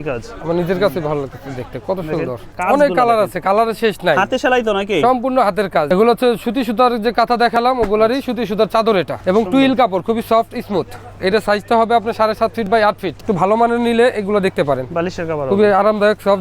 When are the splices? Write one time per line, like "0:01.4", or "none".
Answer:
0:02.5
0:05.9
0:09.1
0:13.1

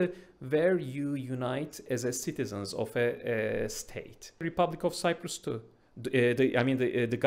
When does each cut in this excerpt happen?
0:04.5

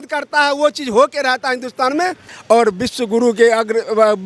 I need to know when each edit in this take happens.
0:02.3

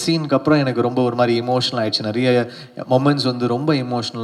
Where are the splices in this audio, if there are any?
none

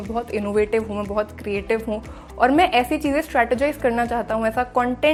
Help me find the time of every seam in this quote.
none

